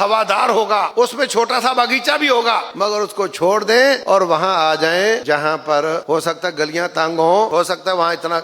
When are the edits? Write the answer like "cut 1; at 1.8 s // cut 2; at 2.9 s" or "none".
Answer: cut 1; at 0.9 s // cut 2; at 2.7 s // cut 3; at 4.0 s // cut 4; at 5.2 s // cut 5; at 6.0 s // cut 6; at 7.5 s